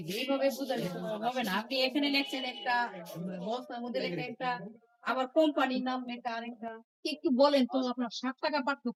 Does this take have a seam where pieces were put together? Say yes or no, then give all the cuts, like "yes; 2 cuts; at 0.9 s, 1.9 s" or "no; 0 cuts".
no; 0 cuts